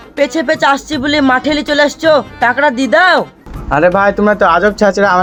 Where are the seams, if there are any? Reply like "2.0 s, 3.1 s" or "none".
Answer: none